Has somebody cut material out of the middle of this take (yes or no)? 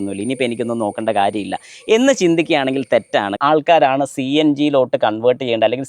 yes